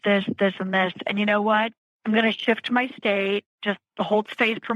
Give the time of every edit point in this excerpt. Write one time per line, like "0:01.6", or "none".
0:01.9